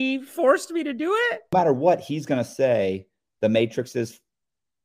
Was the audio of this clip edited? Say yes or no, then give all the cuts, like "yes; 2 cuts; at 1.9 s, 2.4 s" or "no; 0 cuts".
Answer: yes; 1 cut; at 1.5 s